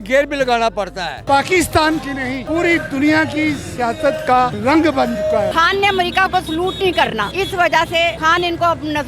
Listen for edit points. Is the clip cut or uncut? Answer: cut